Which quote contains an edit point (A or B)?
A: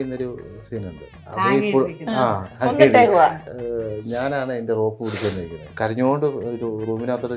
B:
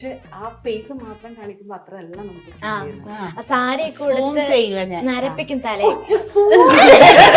A